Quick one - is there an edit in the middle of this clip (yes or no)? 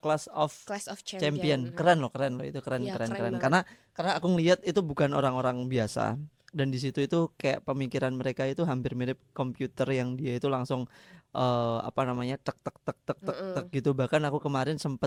no